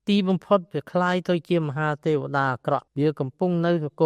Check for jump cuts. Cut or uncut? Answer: cut